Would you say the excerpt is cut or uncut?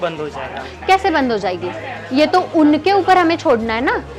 uncut